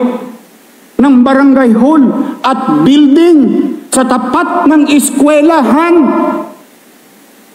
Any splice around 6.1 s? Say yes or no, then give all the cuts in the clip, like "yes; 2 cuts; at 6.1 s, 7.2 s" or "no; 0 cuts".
no; 0 cuts